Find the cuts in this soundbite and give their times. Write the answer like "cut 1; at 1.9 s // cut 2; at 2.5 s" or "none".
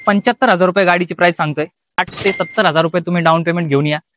cut 1; at 2.0 s